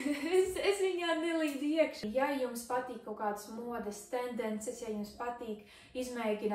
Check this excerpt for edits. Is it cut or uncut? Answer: cut